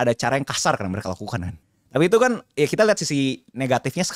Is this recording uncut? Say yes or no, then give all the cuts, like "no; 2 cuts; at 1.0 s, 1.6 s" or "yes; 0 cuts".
no; 1 cut; at 1.5 s